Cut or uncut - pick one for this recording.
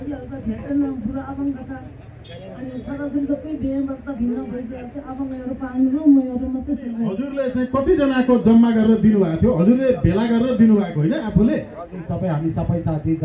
cut